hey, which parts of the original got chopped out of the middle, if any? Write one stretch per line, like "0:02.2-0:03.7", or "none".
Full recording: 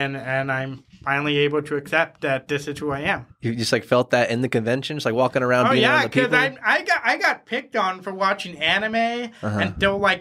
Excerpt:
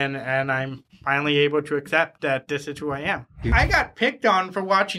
0:03.5-0:07.0